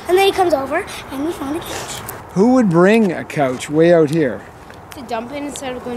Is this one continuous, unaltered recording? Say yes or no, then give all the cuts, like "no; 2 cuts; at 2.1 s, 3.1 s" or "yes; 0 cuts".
no; 1 cut; at 2.2 s